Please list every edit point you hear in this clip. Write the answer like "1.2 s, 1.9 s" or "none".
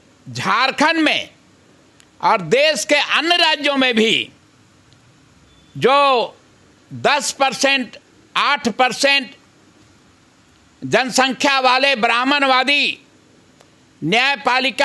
none

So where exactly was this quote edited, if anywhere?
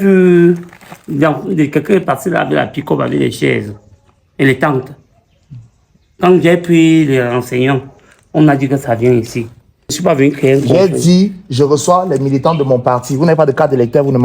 10.0 s

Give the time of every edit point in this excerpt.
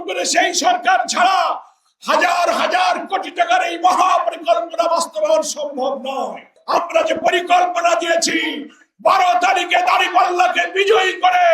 6.6 s

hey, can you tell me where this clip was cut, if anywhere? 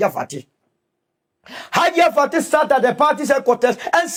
none

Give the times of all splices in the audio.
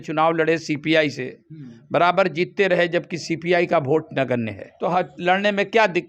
4.6 s

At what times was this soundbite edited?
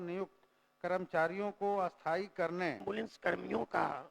2.8 s

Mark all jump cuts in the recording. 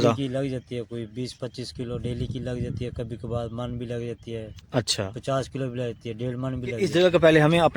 6.8 s

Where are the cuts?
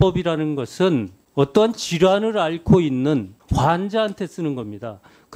1.2 s, 3.4 s

